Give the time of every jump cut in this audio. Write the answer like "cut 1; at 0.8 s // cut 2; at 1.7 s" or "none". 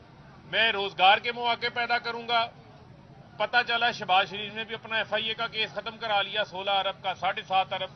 none